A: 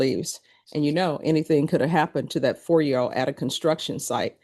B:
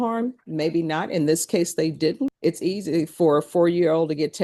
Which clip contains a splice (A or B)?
B